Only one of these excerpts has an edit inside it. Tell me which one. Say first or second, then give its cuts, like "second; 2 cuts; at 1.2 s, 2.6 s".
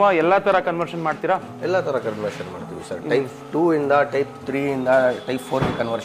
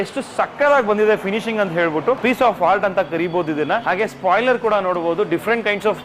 second; 2 cuts; at 2.2 s, 3.8 s